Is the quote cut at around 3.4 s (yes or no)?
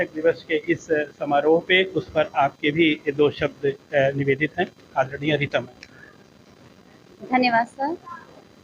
no